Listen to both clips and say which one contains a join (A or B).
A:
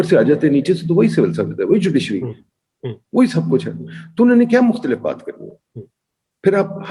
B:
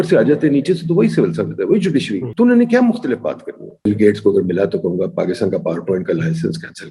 B